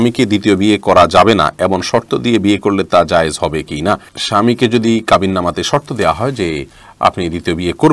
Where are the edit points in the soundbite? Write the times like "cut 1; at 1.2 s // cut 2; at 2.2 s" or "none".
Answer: none